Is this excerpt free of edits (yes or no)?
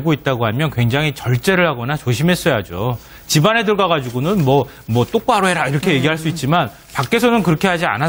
yes